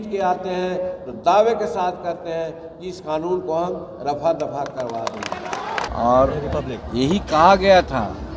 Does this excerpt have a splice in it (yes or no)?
yes